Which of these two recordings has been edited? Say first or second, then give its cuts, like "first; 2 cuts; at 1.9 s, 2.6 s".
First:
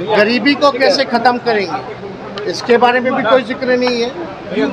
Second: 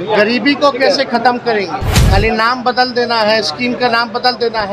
second; 1 cut; at 1.9 s